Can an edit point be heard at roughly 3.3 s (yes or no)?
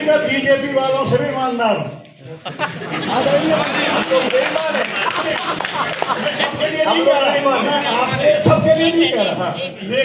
no